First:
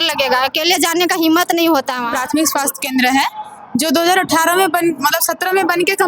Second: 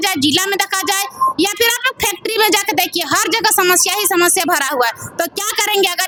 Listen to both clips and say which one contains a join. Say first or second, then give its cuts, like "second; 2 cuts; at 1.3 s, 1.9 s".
first; 1 cut; at 2.0 s